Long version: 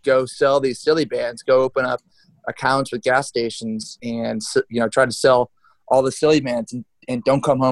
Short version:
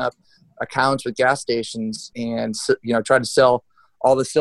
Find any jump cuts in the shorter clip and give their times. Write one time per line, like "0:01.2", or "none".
none